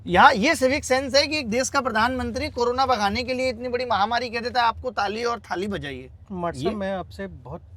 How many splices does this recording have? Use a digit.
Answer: 0